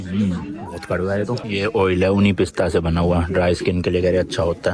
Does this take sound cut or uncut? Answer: uncut